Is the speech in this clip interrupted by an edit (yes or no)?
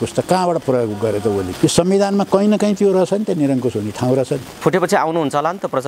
yes